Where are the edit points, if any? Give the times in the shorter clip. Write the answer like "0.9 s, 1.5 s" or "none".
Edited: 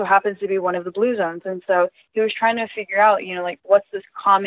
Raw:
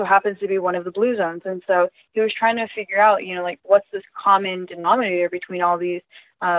none